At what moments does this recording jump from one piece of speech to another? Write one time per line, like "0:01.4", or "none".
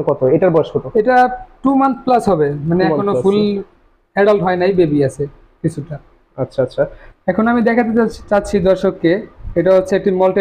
0:07.0